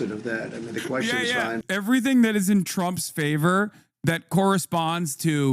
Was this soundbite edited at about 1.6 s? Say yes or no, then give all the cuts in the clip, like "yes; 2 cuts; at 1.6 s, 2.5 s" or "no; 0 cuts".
yes; 1 cut; at 1.6 s